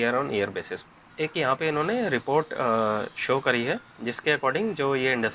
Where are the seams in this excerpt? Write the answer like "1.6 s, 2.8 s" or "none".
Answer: none